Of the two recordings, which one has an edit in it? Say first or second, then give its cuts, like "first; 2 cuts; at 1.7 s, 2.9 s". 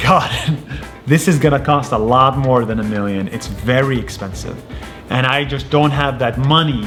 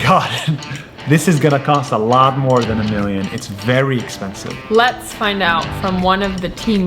second; 1 cut; at 4.6 s